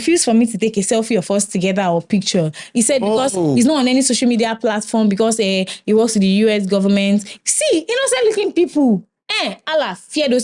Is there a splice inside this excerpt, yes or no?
yes